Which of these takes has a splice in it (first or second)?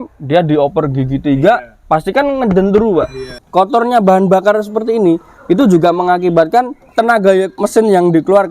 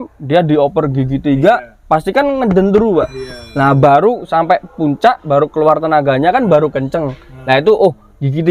first